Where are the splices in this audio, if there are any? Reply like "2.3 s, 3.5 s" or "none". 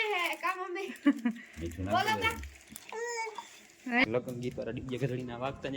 4.0 s